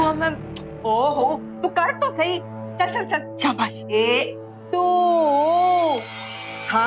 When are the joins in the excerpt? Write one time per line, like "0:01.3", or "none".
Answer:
0:03.8